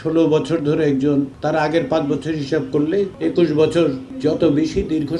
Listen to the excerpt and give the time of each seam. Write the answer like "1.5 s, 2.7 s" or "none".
1.3 s, 3.1 s, 4.1 s